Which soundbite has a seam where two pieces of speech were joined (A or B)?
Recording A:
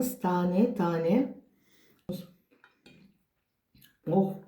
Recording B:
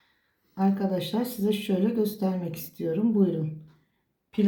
A